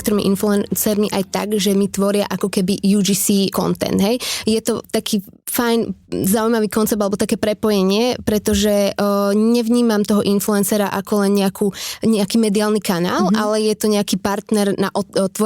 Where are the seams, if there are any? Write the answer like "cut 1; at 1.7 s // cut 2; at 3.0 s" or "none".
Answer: cut 1; at 3.5 s // cut 2; at 4.8 s